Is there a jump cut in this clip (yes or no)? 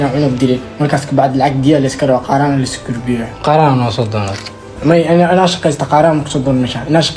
no